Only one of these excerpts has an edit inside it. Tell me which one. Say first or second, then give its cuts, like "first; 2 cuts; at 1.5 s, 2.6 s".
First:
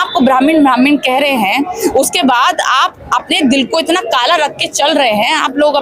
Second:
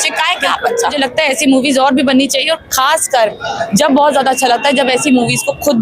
second; 1 cut; at 1.0 s